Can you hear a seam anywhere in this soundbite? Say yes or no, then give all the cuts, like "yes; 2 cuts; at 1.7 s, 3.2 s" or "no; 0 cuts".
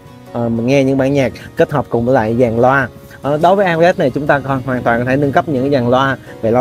no; 0 cuts